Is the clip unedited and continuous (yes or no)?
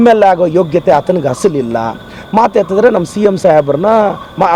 yes